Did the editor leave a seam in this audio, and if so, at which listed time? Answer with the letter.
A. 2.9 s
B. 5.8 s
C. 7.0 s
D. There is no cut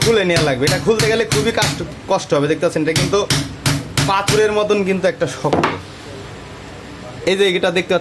D